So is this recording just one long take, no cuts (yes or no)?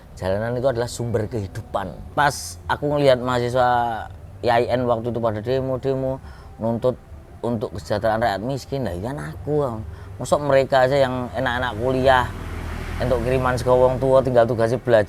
no